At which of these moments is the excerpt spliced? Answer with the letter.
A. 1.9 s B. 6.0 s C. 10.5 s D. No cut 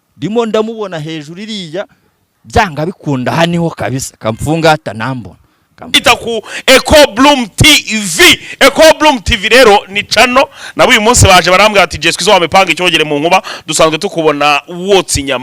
B